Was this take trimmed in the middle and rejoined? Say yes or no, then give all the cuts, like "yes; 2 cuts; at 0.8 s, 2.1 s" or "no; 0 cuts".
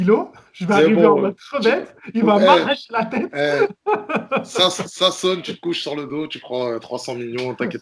no; 0 cuts